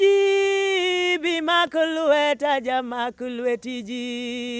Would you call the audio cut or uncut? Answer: uncut